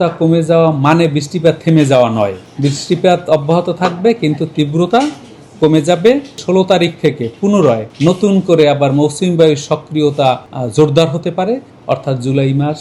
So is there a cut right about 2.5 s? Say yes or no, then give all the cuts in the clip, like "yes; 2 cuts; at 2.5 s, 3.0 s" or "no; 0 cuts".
yes; 5 cuts; at 2.5 s, 6.4 s, 7.9 s, 10.5 s, 11.7 s